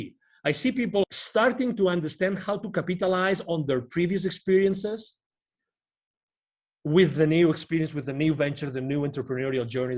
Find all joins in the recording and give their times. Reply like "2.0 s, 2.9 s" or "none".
1.0 s